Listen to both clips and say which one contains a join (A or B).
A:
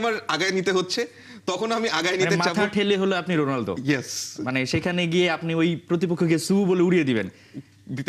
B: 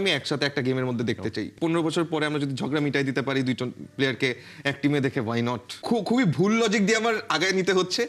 B